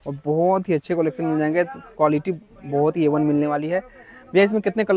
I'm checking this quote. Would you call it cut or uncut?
uncut